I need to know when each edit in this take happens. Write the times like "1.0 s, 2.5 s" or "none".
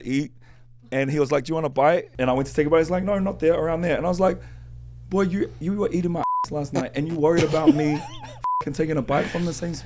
2.1 s